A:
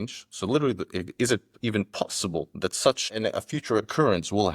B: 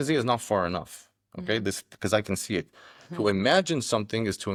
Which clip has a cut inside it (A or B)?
A